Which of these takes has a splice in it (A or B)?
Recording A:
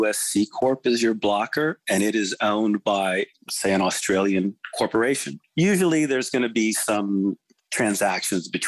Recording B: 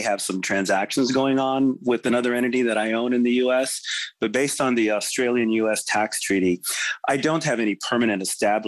A